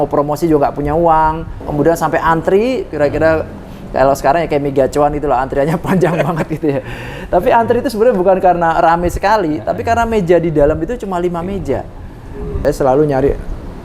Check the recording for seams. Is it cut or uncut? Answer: cut